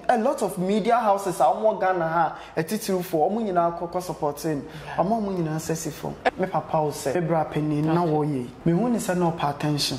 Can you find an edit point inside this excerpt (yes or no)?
yes